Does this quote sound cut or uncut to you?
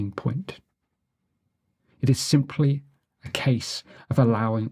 uncut